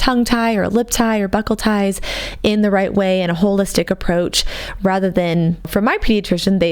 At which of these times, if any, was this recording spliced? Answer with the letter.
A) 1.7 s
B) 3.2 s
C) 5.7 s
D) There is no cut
C